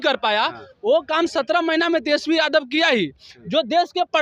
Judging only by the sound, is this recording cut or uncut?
uncut